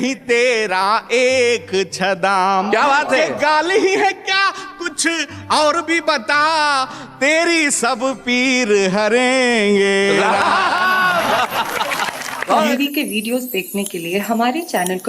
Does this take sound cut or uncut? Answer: cut